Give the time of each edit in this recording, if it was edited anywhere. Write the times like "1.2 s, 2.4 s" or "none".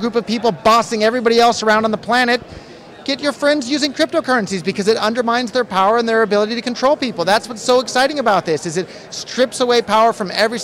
none